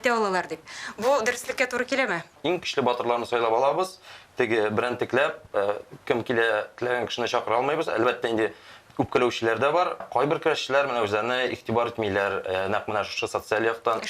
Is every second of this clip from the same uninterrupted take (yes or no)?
no